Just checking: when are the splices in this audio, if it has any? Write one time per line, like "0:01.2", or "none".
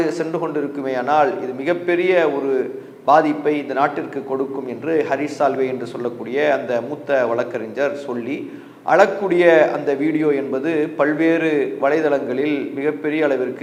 none